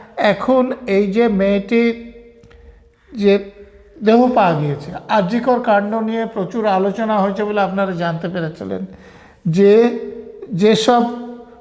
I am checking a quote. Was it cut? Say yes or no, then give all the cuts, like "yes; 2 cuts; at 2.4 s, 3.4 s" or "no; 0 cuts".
no; 0 cuts